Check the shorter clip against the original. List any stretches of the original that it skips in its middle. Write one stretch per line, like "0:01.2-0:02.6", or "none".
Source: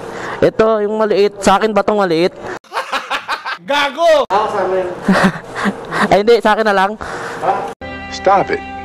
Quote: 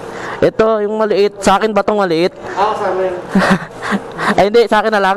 0:02.5-0:04.3